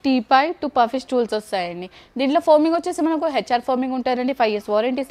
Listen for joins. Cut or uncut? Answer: uncut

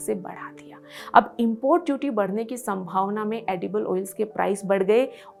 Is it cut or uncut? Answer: uncut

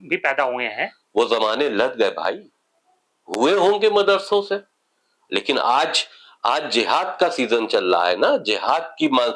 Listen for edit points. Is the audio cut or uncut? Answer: uncut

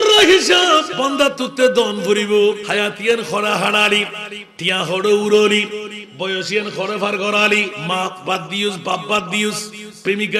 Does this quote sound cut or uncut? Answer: cut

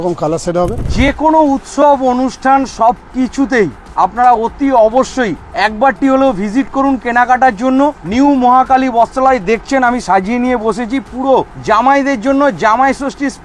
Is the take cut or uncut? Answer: cut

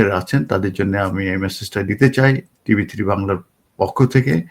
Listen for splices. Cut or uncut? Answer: uncut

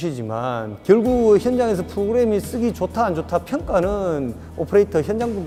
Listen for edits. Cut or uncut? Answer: uncut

